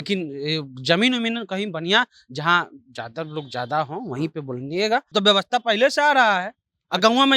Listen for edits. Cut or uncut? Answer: cut